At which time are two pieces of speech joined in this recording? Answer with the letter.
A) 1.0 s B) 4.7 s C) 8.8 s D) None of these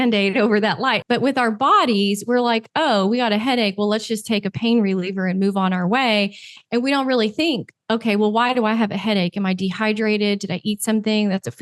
A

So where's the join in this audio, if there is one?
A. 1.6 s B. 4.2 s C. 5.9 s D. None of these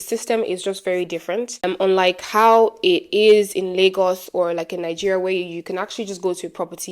A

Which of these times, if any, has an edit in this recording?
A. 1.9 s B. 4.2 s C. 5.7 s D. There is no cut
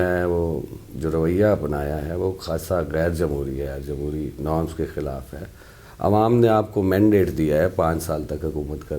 D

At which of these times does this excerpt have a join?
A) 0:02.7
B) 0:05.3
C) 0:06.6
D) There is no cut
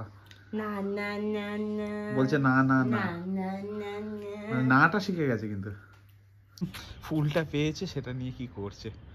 C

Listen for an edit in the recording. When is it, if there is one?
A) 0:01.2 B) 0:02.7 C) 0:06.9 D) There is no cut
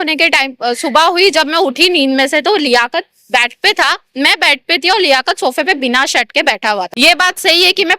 C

